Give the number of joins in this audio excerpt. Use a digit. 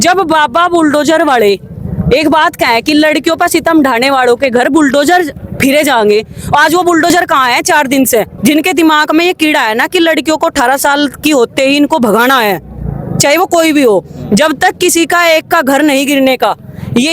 1